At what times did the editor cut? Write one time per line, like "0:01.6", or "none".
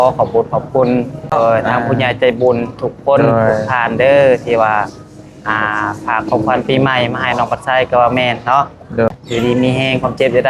0:01.3
0:09.1